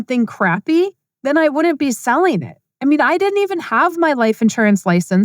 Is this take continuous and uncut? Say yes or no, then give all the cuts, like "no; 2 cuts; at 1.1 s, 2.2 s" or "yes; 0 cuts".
yes; 0 cuts